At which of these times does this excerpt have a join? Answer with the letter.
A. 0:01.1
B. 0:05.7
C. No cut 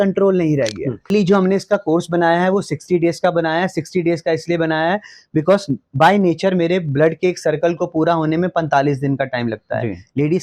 A